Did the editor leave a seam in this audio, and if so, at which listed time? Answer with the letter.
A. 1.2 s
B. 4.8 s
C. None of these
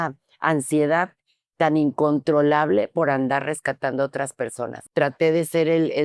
B